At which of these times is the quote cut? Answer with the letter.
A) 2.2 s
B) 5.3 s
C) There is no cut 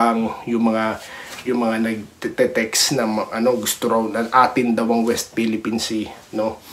C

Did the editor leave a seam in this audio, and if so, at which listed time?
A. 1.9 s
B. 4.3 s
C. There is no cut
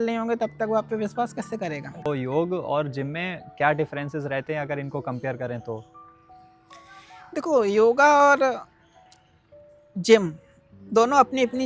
A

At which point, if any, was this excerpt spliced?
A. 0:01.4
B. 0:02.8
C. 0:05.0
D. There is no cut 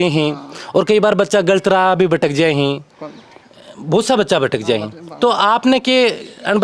D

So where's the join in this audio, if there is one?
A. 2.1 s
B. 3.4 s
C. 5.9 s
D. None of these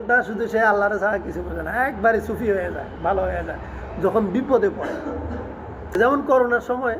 C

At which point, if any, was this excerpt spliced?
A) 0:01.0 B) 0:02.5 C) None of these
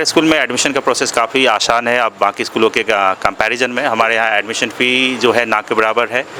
C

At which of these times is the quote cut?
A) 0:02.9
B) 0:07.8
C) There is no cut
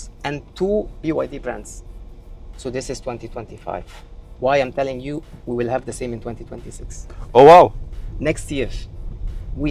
C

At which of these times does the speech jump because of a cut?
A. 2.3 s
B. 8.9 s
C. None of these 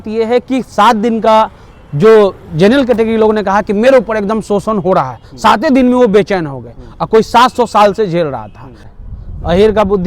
B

